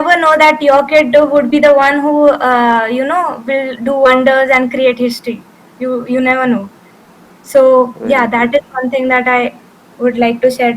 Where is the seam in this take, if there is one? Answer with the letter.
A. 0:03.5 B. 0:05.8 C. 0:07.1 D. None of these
D